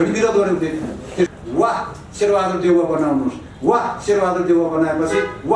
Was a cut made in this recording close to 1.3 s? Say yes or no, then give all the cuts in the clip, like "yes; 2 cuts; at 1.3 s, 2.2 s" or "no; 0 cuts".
yes; 1 cut; at 1.3 s